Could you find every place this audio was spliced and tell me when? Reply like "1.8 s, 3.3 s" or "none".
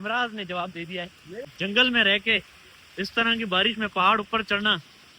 1.3 s